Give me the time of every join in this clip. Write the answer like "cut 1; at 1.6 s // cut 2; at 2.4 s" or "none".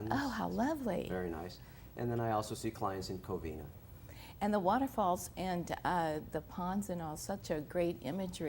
cut 1; at 6.3 s